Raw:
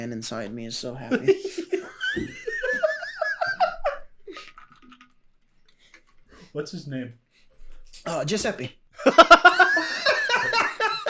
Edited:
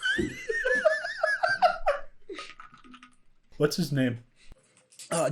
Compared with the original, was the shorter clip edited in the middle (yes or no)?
yes